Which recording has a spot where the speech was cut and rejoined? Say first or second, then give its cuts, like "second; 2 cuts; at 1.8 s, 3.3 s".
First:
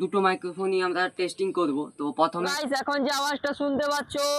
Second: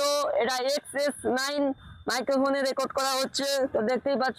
first; 1 cut; at 2.5 s